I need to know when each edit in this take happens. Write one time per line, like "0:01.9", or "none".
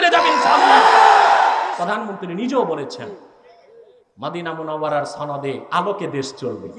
0:01.6